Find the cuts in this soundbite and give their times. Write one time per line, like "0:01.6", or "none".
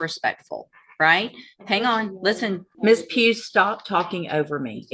0:02.7

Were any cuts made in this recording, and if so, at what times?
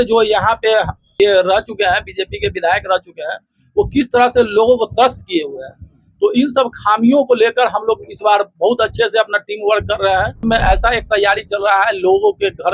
0:01.1
0:10.4

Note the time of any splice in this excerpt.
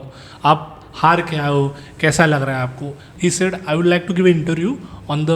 0:03.0

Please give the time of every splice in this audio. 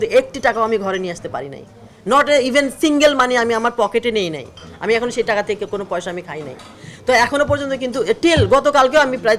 none

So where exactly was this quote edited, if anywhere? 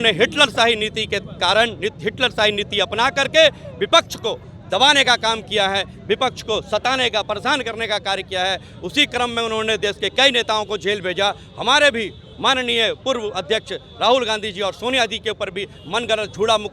none

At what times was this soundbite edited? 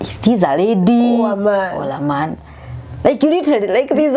none

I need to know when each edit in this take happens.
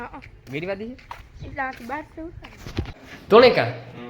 0:03.0

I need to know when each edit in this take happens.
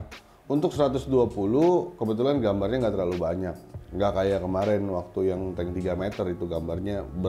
none

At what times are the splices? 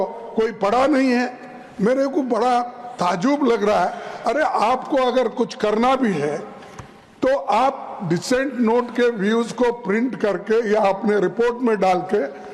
none

